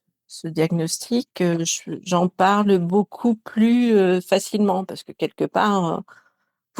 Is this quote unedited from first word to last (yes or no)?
yes